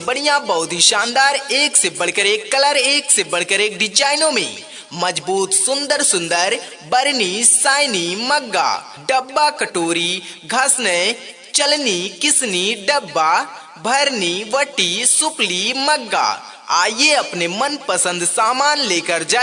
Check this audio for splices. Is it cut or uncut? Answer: uncut